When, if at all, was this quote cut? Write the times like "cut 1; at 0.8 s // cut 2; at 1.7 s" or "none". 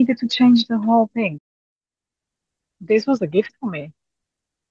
cut 1; at 1.5 s